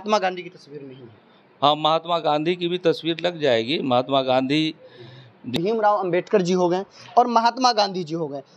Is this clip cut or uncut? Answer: cut